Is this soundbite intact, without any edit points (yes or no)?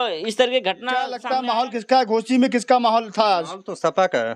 no